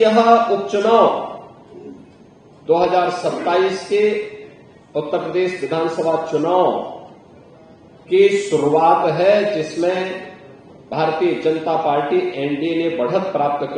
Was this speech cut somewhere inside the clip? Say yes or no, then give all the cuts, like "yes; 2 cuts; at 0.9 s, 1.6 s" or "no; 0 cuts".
no; 0 cuts